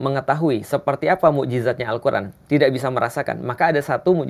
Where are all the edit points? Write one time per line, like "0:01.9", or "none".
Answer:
none